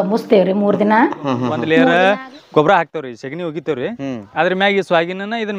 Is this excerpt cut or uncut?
cut